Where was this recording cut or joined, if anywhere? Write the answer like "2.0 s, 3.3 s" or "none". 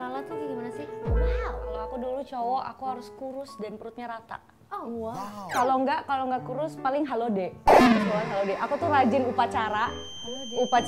1.9 s, 5.3 s